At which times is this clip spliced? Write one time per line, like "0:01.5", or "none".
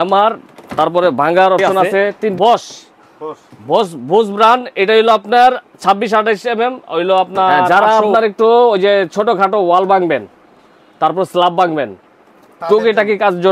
0:02.3
0:07.7